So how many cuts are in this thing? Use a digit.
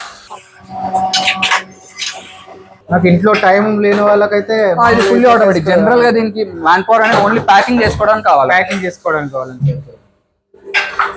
0